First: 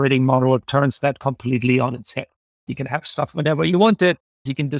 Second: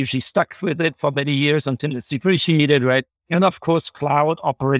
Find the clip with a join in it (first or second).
second